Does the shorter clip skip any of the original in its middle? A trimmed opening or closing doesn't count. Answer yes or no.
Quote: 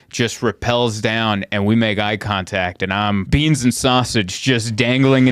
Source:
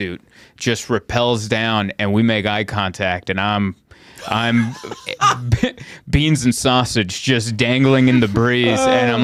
yes